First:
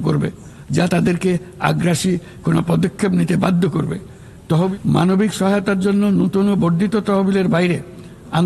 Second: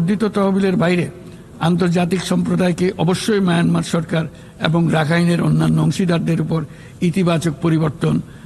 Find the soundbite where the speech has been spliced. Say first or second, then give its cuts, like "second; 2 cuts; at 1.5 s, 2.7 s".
first; 1 cut; at 4.7 s